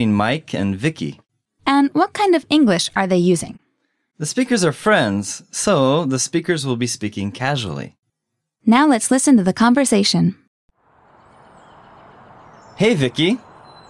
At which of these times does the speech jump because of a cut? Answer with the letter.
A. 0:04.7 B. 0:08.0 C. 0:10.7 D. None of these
C